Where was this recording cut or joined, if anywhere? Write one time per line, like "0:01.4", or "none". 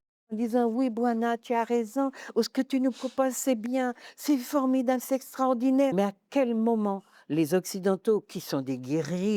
0:05.9